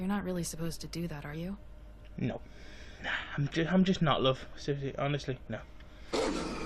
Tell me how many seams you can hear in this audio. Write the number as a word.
one